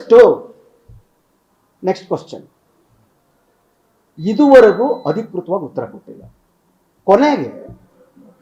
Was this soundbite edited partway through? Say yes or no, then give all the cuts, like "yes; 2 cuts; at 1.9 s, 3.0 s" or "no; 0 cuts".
no; 0 cuts